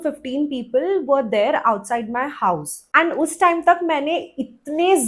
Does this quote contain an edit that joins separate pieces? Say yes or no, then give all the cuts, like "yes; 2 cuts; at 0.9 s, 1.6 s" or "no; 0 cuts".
no; 0 cuts